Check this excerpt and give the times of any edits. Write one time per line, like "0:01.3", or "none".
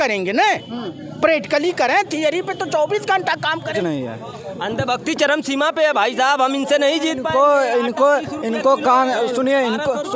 0:03.8